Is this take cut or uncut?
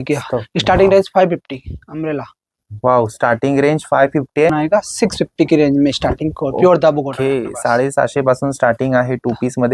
cut